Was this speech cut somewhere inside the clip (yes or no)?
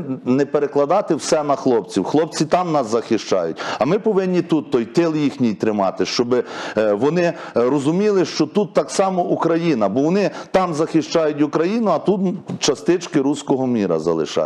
no